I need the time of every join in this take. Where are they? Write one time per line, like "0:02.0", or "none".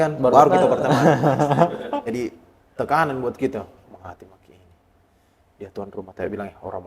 0:02.0